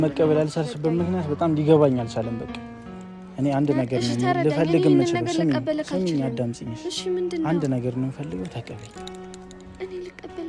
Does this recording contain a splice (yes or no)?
no